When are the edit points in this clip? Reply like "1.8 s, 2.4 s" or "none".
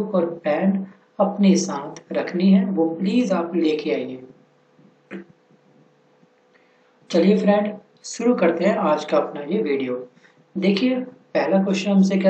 none